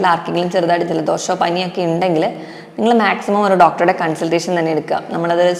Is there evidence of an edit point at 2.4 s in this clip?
no; 0 cuts

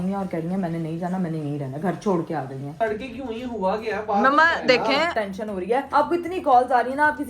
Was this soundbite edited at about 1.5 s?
no; 2 cuts; at 2.7 s, 5.3 s

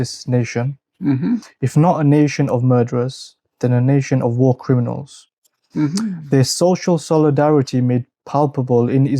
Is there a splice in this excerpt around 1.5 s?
yes; 1 cut; at 1.5 s

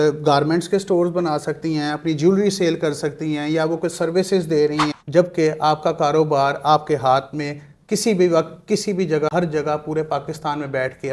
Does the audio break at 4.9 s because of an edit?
yes; 2 cuts; at 4.9 s, 9.3 s

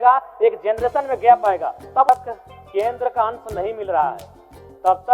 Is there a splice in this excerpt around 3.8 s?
no; 1 cut; at 2.1 s

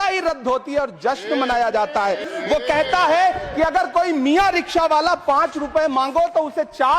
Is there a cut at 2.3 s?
yes; 1 cut; at 2.3 s

